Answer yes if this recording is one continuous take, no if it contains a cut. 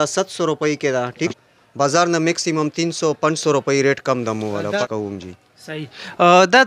no